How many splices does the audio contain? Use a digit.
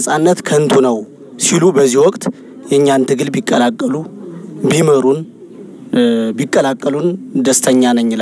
0